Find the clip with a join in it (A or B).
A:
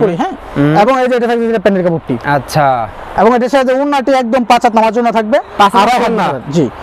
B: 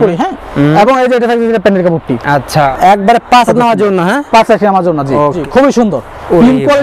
B